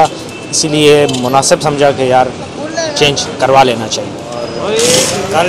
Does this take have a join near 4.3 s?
yes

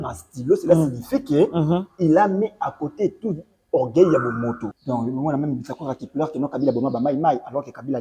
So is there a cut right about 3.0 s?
no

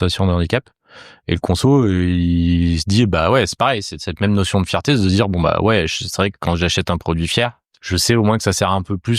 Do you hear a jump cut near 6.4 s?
no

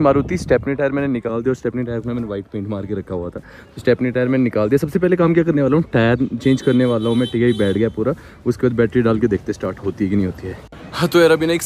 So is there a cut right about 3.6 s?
no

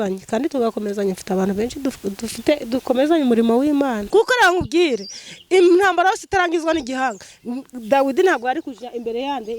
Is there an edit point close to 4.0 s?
yes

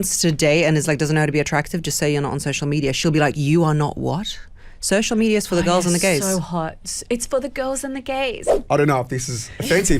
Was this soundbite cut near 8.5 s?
yes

